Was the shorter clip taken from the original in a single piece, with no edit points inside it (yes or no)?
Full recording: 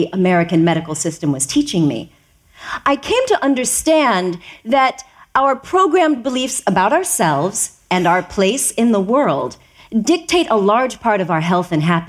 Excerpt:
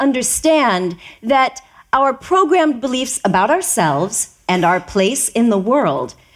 yes